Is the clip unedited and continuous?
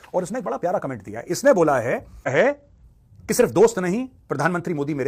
no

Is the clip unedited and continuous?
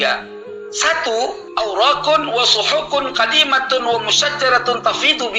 no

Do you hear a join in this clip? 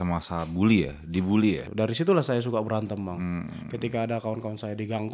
yes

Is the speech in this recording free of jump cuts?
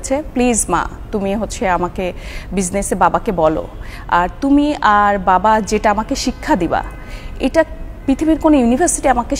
yes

